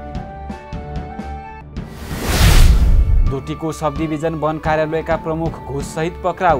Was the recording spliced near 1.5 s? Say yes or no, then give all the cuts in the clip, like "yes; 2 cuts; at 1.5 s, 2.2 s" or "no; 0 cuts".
yes; 1 cut; at 1.5 s